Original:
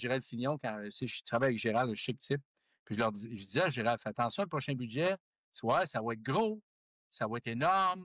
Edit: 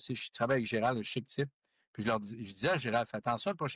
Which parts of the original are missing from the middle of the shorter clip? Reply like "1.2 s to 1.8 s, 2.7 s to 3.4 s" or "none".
none